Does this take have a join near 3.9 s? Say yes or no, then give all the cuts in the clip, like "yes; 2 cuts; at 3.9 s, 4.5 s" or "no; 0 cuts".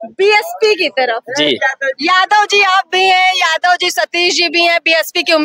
no; 0 cuts